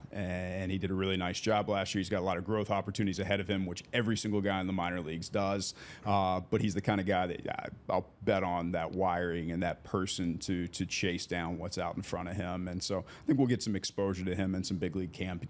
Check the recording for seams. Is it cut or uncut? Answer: uncut